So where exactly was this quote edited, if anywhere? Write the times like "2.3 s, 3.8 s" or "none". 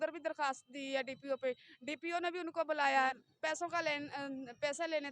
3.2 s